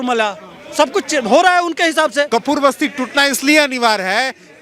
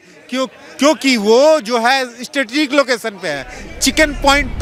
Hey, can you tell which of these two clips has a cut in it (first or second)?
first